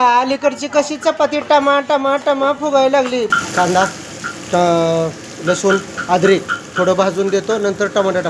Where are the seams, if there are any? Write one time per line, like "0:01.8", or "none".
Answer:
0:03.3